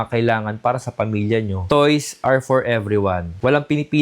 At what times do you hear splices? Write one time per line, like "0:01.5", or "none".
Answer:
0:01.6

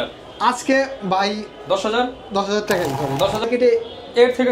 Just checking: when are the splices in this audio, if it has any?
0:03.4

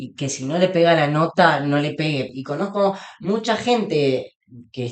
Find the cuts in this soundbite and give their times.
0:02.3

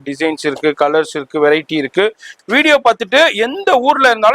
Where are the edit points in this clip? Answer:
0:02.3

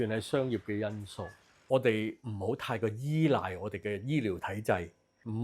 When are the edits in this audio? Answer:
0:01.6

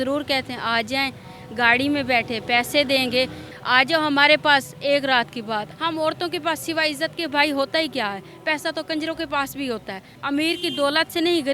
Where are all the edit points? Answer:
0:03.5
0:05.7
0:10.1

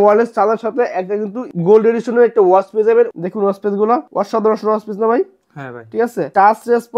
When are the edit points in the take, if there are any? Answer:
0:03.1

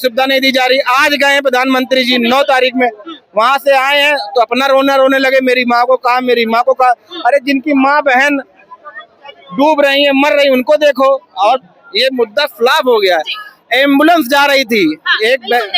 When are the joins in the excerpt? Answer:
0:11.6

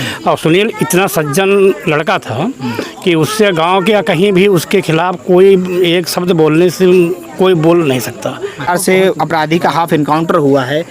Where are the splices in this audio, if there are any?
0:08.7

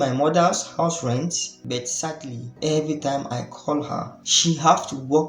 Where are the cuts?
0:01.5
0:02.5
0:04.2

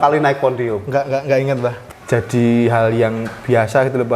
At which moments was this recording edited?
0:01.9

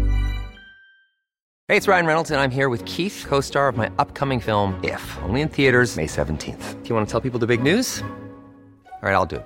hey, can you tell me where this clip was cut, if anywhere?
0:01.4

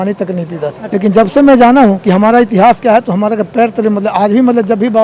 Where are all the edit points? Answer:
0:00.8
0:02.0

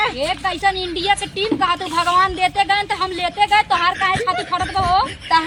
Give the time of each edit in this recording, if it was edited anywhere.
none

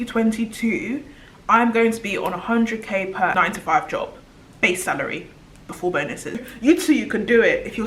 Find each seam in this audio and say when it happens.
0:03.3
0:06.4

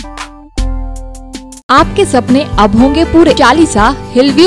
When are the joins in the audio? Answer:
0:01.6
0:03.4

